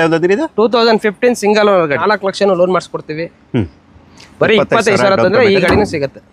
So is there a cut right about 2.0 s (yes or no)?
yes